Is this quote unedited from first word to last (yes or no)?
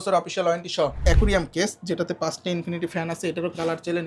no